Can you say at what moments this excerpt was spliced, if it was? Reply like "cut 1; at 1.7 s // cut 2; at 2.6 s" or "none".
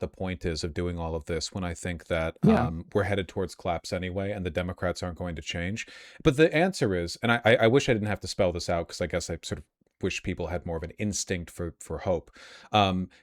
none